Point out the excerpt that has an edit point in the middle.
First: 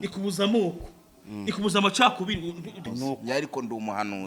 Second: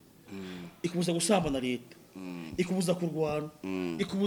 first; 1 cut; at 2.7 s

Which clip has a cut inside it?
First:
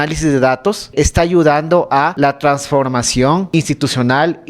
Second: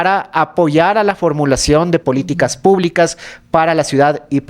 first; 3 cuts; at 0.9 s, 2.1 s, 3.5 s

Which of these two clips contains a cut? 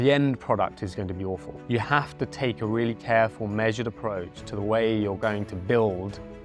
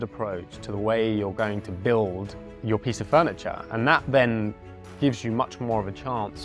first; 1 cut; at 1.5 s

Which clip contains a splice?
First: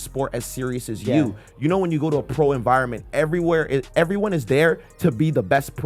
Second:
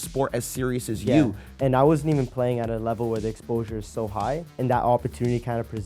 second; 2 cuts; at 1.4 s, 4.5 s

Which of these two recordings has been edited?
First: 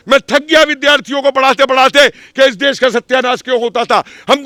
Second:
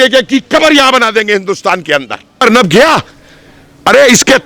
second; 1 cut; at 2.4 s

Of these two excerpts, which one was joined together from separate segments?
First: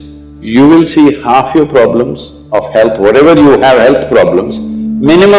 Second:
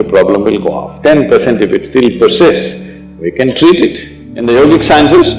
second; 1 cut; at 4.3 s

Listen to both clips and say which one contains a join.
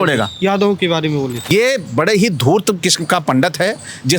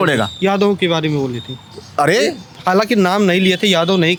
first; 1 cut; at 1.4 s

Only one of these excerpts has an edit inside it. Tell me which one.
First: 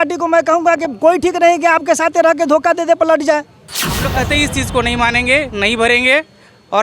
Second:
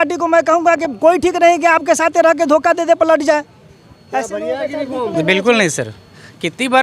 first; 1 cut; at 4.0 s

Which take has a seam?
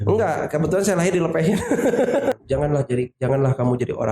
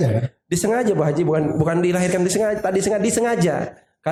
first; 1 cut; at 2.3 s

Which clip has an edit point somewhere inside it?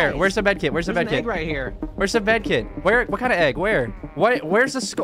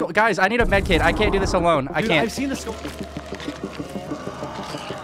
first; 1 cut; at 4.0 s

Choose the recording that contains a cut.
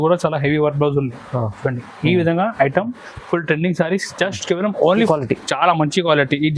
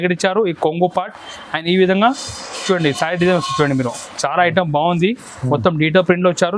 first; 1 cut; at 5.1 s

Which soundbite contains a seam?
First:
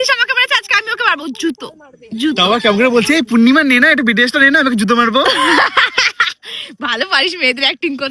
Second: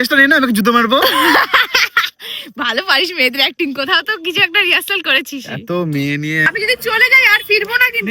second; 1 cut; at 6.5 s

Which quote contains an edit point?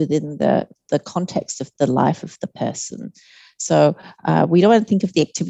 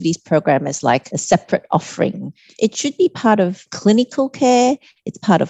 second; 3 cuts; at 1.1 s, 2.5 s, 3.7 s

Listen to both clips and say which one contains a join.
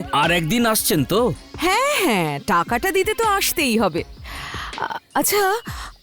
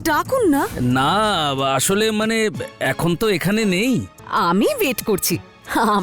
second; 1 cut; at 4.1 s

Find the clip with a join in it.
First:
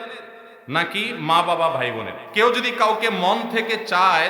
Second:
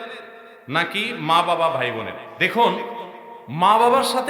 first; 1 cut; at 2.2 s

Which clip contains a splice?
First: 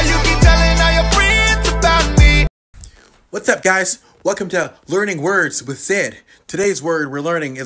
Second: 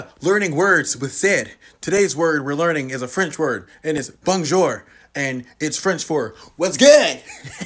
first; 1 cut; at 2.5 s

